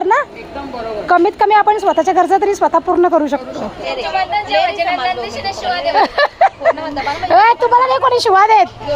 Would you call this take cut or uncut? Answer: cut